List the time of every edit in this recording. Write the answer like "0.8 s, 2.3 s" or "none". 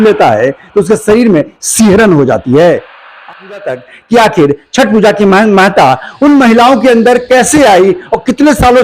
3.2 s

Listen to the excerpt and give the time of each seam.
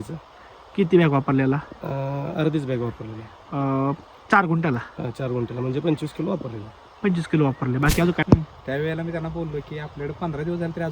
8.2 s

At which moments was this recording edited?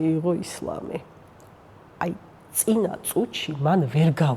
none

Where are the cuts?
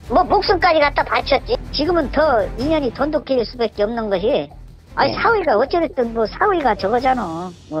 1.6 s

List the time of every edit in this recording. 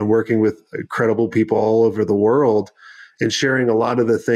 none

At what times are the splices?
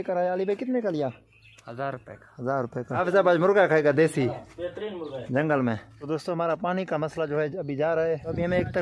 3.0 s, 5.9 s

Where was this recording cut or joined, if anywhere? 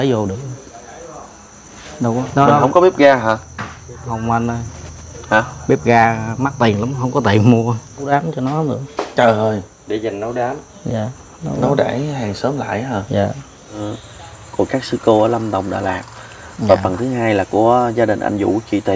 2.2 s, 8.1 s, 13.8 s

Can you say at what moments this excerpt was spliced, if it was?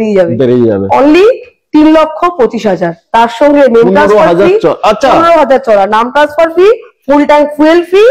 none

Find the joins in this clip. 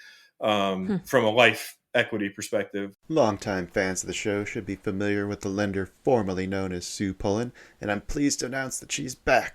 3.0 s

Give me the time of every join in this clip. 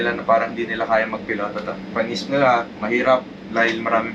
none

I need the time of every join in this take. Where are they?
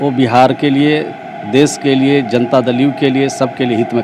none

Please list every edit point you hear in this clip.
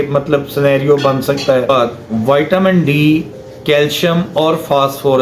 2.1 s

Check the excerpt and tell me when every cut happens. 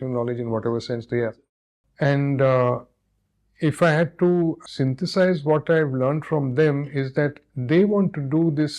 1.8 s, 4.6 s

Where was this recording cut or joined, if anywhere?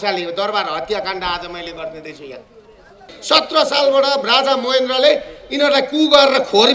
3.1 s

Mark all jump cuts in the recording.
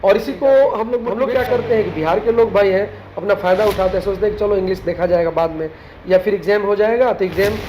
1.1 s

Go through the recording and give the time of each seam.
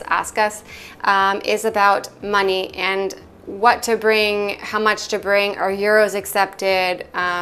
none

